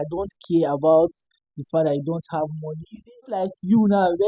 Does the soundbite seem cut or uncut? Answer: cut